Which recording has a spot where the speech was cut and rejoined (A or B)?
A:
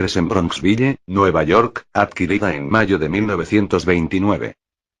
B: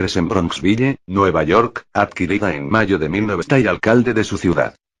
A